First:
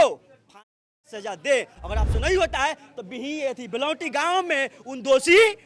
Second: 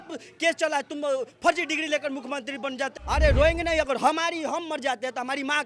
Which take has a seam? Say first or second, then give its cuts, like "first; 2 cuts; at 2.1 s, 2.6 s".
second; 1 cut; at 2.9 s